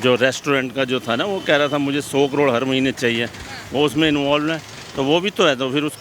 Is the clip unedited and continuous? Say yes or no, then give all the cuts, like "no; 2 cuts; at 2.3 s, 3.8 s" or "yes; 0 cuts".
yes; 0 cuts